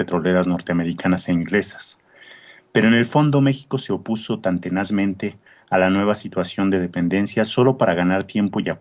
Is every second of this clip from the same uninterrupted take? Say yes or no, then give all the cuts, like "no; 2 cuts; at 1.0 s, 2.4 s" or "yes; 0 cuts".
yes; 0 cuts